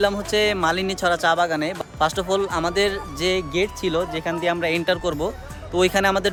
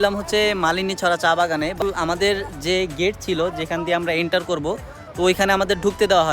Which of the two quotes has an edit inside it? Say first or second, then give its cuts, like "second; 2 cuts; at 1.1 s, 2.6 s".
second; 1 cut; at 1.8 s